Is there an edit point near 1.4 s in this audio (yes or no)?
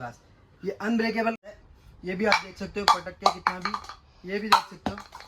yes